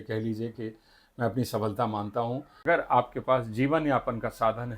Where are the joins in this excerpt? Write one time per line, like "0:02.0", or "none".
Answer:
0:02.6